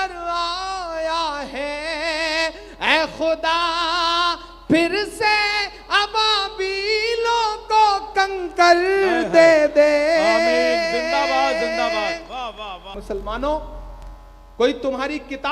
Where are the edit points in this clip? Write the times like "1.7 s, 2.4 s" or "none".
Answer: 13.0 s